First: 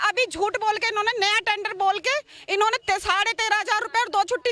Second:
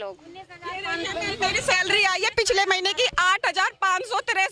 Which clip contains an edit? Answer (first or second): second